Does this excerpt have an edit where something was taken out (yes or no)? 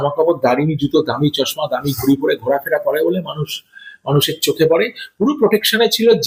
no